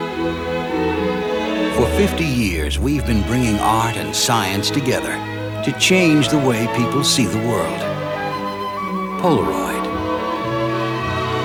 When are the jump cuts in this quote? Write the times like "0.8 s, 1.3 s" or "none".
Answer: none